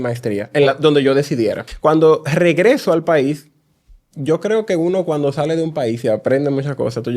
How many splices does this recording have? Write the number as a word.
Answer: one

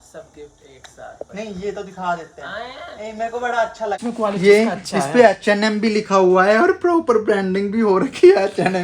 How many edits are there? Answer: one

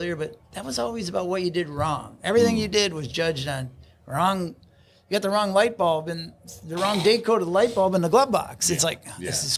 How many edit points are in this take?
zero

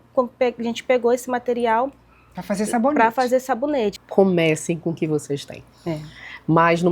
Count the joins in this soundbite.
one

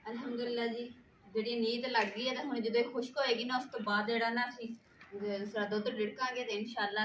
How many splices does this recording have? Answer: zero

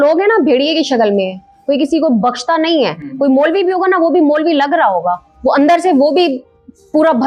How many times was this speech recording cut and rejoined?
zero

